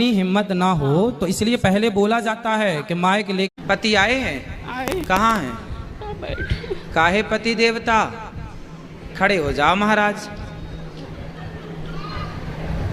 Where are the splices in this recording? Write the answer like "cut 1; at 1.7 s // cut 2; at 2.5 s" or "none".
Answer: cut 1; at 3.6 s